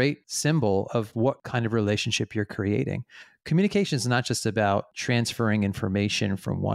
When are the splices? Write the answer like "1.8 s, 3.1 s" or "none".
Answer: none